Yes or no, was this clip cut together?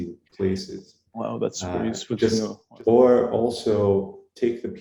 yes